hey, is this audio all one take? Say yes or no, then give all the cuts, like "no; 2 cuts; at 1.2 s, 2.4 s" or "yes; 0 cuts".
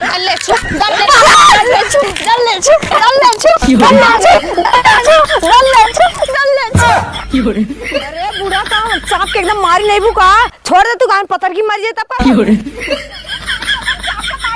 yes; 0 cuts